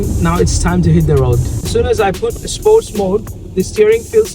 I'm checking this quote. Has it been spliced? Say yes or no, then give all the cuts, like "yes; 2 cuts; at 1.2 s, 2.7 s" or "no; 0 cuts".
yes; 1 cut; at 1.5 s